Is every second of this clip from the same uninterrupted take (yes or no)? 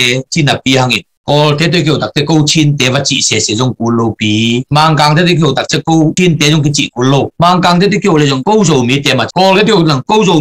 yes